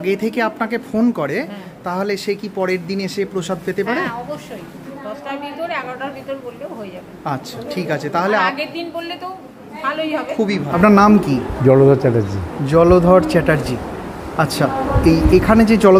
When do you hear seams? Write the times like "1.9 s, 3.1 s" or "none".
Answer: 4.9 s, 10.7 s